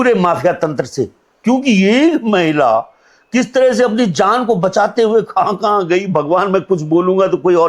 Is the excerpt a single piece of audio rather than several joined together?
yes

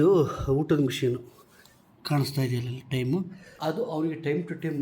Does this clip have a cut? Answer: yes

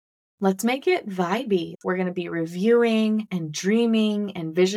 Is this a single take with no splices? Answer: no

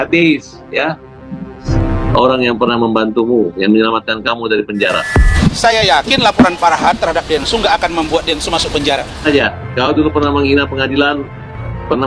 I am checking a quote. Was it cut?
yes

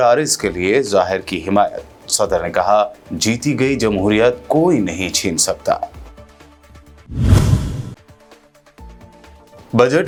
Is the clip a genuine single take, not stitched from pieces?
yes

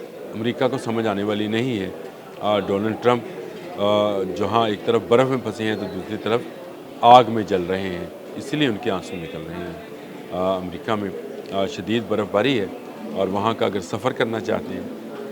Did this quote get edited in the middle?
no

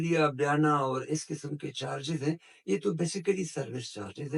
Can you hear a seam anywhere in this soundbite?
no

